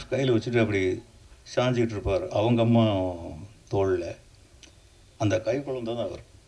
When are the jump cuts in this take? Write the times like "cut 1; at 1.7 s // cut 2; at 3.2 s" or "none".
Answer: none